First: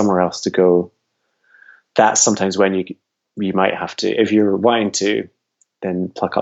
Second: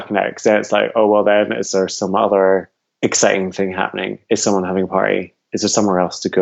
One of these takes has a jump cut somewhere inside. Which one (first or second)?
second